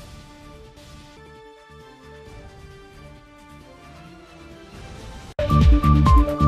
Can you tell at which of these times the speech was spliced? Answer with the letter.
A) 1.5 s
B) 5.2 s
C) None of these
B